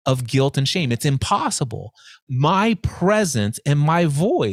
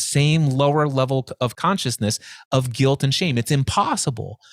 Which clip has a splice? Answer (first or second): second